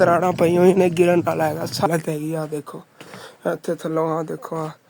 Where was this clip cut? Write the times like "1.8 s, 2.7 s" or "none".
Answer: 1.9 s